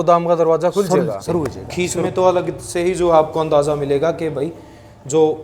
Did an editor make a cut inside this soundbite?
yes; 1 cut; at 1.6 s

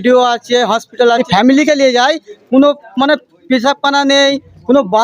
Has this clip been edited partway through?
yes; 1 cut; at 1.2 s

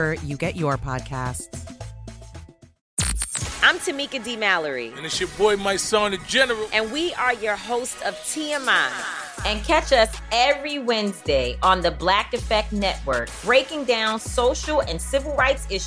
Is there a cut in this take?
no; 0 cuts

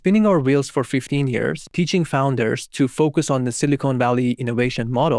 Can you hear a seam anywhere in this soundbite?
yes; 1 cut; at 1.6 s

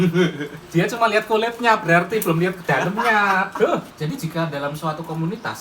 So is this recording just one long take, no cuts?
no; 1 cut; at 3.9 s

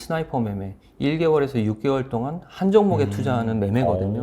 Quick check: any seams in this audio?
no; 0 cuts

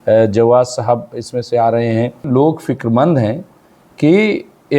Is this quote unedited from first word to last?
no; 1 cut; at 2.3 s

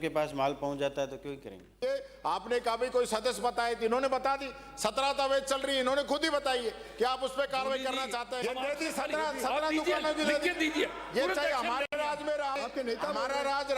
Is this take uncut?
no; 3 cuts; at 1.8 s, 8.3 s, 12.6 s

